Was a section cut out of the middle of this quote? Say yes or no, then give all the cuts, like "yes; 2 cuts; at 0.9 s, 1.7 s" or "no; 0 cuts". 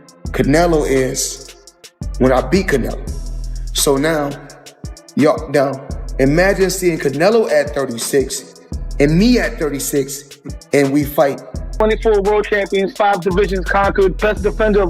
yes; 1 cut; at 11.7 s